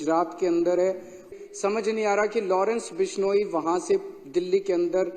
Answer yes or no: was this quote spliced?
yes